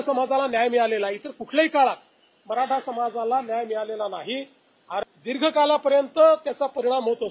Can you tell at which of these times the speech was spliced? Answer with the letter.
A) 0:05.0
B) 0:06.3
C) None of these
A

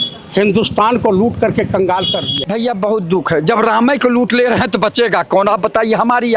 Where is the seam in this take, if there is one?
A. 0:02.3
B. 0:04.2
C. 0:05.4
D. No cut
A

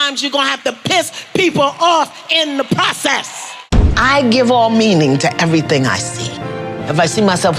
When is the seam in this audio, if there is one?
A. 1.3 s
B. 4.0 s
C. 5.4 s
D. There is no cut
B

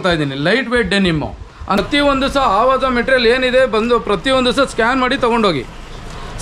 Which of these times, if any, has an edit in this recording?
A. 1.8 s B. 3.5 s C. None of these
A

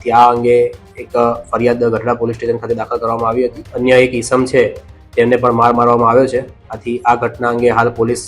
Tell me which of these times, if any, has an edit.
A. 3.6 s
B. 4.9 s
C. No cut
A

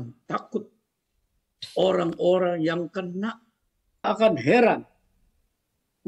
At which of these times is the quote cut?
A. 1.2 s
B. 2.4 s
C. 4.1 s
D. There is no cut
C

